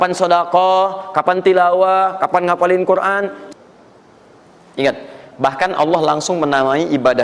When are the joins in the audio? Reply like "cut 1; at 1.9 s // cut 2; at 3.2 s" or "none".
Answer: cut 1; at 3.4 s